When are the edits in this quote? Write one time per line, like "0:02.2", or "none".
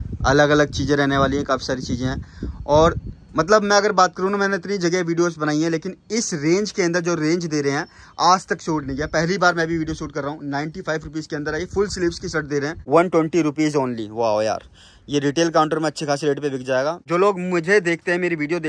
0:12.8
0:17.0